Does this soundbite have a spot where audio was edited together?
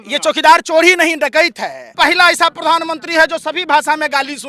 yes; 1 cut; at 1.9 s

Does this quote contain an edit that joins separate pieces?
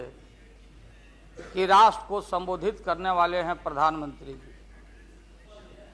no; 0 cuts

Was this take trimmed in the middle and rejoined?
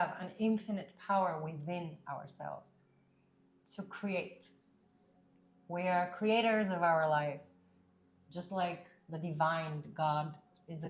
no; 0 cuts

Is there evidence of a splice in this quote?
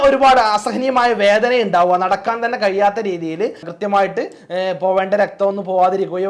yes; 1 cut; at 3.7 s

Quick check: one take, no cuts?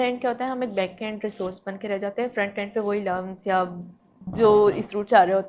yes; 0 cuts

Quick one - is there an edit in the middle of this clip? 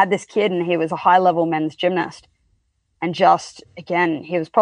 no; 0 cuts

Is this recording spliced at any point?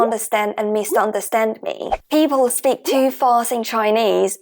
yes; 1 cut; at 1.9 s

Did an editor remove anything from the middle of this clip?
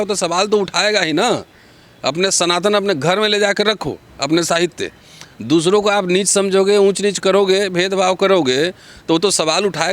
no; 0 cuts

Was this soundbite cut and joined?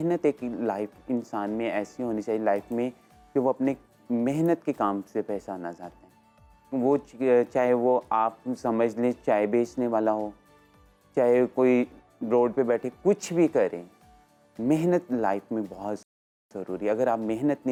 no; 0 cuts

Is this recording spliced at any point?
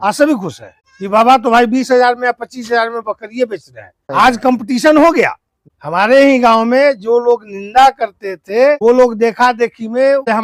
no; 0 cuts

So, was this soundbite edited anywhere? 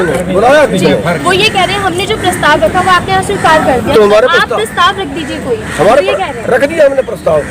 no; 0 cuts

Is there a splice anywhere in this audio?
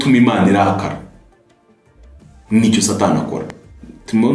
no; 0 cuts

